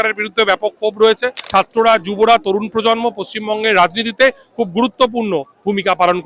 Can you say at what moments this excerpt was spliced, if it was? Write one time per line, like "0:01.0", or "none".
0:01.4